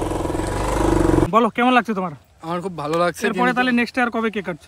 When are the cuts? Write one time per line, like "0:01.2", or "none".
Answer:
0:01.2